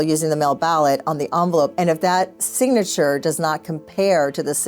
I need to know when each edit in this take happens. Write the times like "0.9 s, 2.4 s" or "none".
1.7 s